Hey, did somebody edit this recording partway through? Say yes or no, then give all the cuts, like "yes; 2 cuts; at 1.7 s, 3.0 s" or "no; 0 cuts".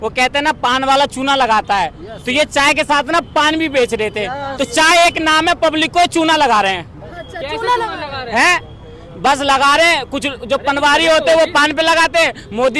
no; 0 cuts